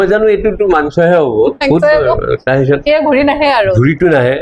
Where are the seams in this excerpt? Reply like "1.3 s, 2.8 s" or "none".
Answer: none